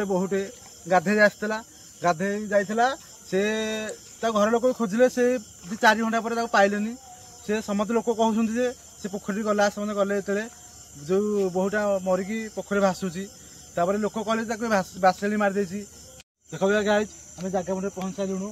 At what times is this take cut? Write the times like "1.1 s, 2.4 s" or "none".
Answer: 16.1 s